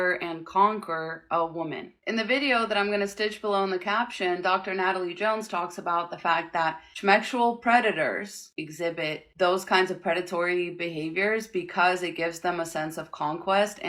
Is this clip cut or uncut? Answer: uncut